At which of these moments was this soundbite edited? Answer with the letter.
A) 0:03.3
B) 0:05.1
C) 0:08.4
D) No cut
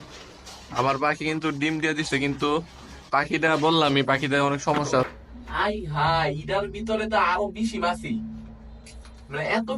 B